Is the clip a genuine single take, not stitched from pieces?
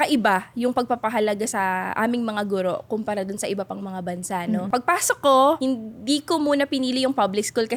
yes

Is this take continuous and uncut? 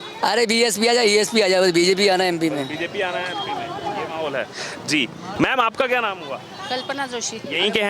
yes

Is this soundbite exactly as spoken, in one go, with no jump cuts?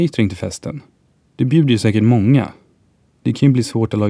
yes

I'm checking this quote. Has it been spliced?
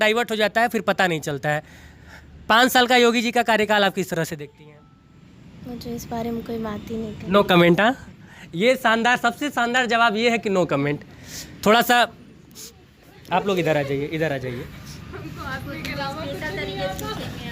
no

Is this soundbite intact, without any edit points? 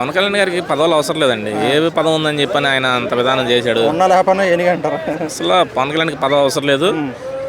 yes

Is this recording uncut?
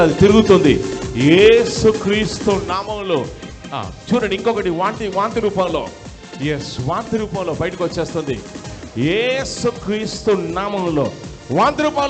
no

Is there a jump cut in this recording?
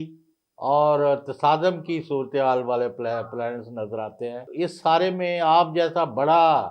yes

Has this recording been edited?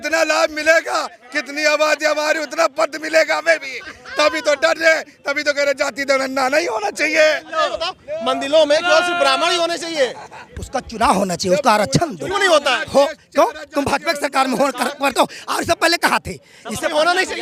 no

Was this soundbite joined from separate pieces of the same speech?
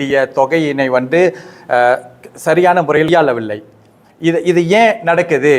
yes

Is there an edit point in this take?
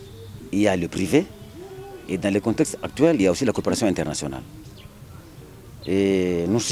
no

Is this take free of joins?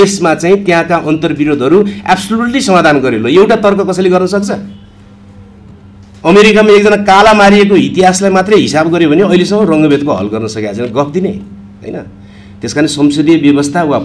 yes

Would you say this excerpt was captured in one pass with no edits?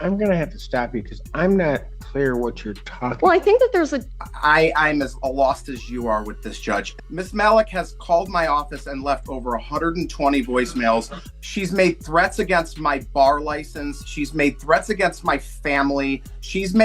no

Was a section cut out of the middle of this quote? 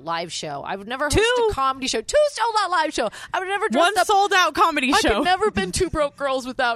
no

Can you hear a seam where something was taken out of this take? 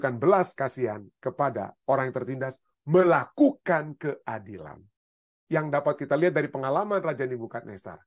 yes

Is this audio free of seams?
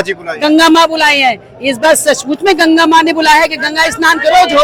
yes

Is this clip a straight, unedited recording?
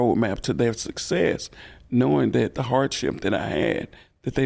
yes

